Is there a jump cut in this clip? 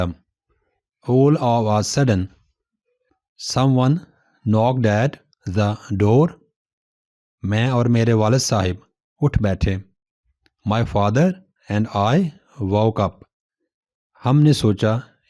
no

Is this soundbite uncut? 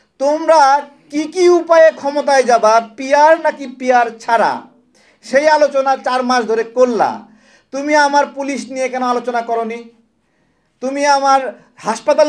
yes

